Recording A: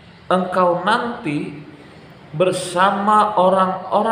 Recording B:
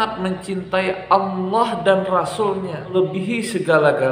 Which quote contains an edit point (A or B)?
B